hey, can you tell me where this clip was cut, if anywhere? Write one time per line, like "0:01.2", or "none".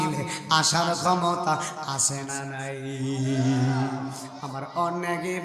0:04.4